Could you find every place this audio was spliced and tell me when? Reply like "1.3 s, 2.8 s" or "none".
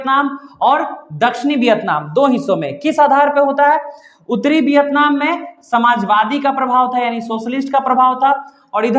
none